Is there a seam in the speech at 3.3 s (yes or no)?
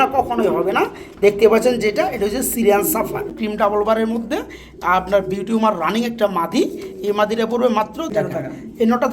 yes